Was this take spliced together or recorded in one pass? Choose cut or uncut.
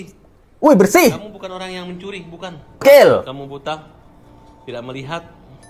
cut